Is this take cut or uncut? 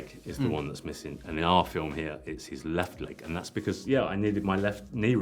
uncut